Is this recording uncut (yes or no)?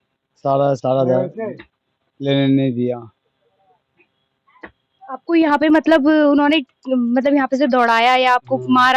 yes